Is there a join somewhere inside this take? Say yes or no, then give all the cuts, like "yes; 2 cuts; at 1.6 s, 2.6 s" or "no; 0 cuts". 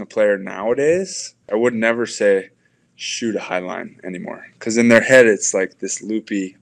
yes; 1 cut; at 1.4 s